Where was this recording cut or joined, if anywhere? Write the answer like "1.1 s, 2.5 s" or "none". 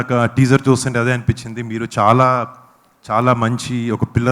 none

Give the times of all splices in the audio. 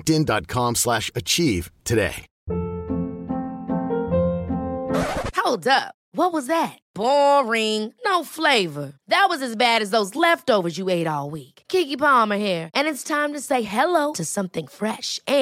2.3 s

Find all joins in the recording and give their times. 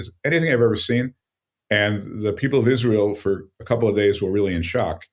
none

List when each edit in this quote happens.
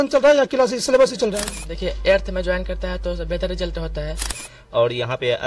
1.6 s, 4.5 s

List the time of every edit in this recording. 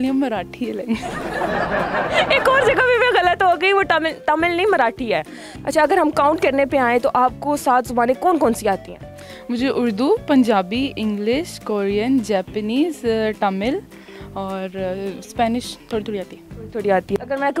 none

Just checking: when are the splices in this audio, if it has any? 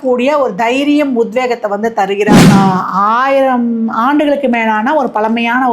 2.5 s

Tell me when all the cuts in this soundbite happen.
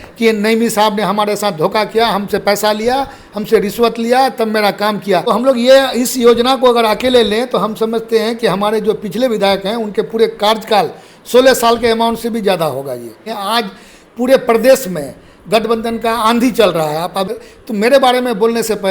5.2 s, 13.3 s, 17.3 s

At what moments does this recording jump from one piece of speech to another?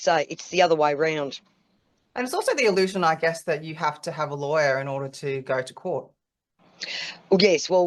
none

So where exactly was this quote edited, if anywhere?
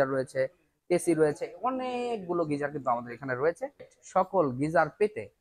3.9 s

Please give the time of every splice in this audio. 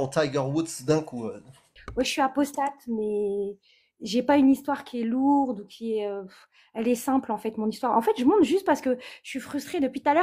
1.8 s

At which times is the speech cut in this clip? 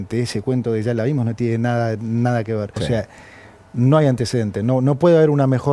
2.7 s

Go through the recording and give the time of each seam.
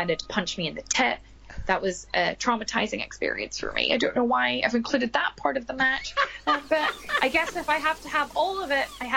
1.3 s

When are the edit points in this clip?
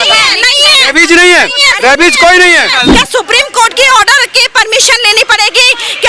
2.8 s

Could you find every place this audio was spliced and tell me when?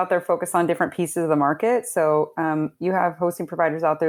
none

